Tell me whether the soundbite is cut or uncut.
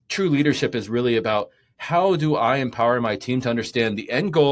uncut